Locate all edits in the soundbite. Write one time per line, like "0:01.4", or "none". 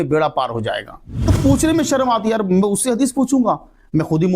0:01.3